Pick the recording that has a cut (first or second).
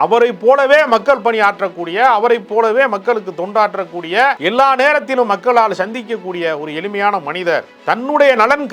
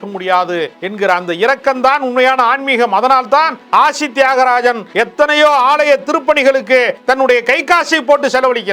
first